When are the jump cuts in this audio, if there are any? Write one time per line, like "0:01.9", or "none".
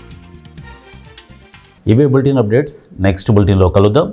none